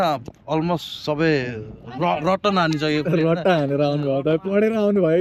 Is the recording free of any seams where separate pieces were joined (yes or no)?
yes